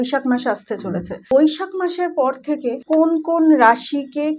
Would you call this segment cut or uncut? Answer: cut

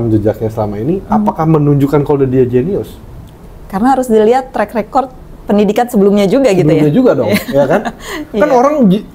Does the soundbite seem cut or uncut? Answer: uncut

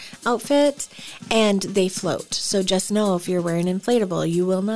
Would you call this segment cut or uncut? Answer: uncut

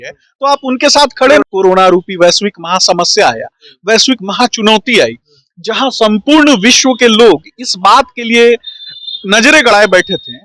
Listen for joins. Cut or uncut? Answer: cut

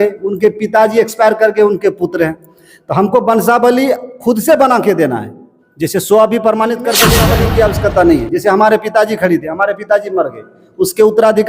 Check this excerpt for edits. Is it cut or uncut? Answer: cut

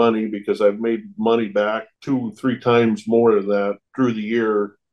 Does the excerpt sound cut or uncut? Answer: uncut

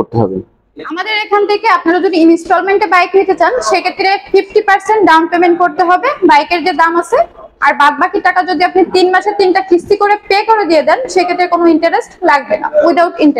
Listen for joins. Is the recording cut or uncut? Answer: uncut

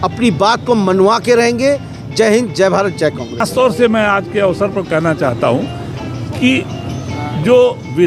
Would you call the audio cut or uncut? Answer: cut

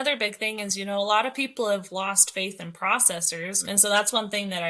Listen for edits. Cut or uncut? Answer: cut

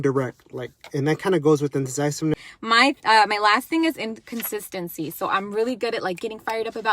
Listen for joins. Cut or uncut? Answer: cut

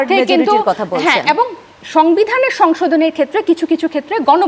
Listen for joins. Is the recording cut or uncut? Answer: uncut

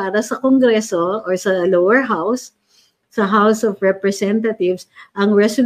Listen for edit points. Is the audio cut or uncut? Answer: uncut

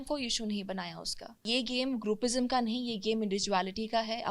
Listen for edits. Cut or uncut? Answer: cut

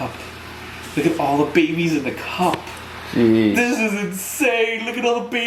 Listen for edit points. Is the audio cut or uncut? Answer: uncut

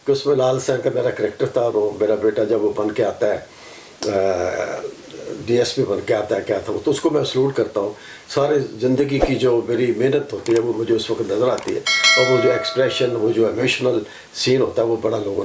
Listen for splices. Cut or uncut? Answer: uncut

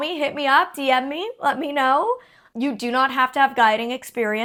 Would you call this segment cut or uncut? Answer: uncut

